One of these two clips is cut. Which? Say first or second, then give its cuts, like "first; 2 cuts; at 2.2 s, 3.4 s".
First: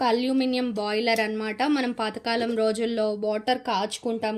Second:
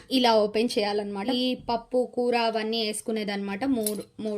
second; 1 cut; at 1.3 s